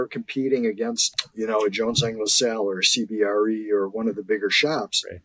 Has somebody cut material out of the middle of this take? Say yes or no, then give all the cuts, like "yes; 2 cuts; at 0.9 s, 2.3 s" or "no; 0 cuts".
yes; 1 cut; at 1.0 s